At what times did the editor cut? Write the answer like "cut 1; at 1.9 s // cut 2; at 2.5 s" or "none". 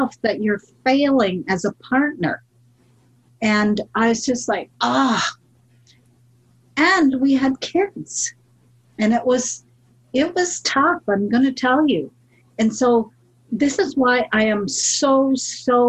none